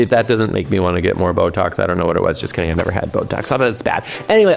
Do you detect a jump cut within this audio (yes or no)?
no